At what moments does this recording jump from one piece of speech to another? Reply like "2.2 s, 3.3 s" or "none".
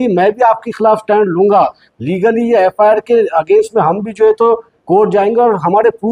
none